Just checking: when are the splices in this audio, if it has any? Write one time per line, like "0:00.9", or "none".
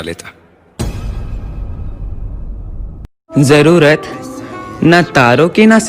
0:03.3